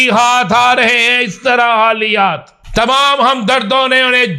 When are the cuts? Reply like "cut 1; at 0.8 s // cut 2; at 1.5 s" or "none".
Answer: cut 1; at 2.5 s